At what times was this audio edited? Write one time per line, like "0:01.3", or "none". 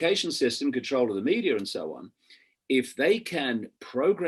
none